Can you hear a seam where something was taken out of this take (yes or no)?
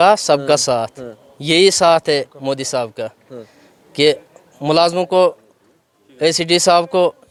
no